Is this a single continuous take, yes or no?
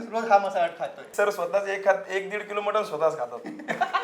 no